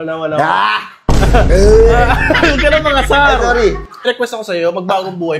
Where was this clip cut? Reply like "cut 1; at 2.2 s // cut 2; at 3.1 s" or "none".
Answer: cut 1; at 3.9 s